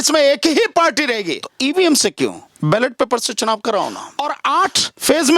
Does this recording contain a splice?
yes; 2 cuts; at 1.4 s, 4.1 s

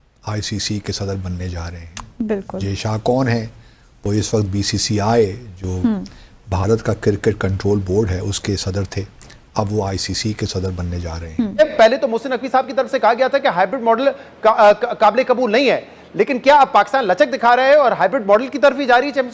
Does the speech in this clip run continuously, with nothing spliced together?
no; 1 cut; at 11.6 s

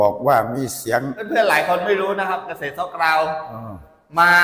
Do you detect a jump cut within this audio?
yes; 1 cut; at 1.2 s

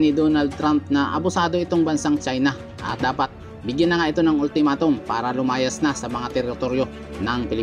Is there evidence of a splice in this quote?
no; 0 cuts

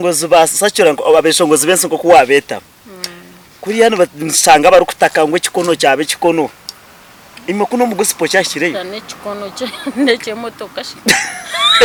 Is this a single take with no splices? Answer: yes; 0 cuts

